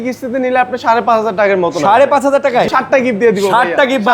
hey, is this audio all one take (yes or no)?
no